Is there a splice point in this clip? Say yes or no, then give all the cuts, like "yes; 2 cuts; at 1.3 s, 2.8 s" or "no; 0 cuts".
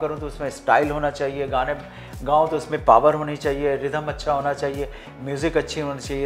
no; 0 cuts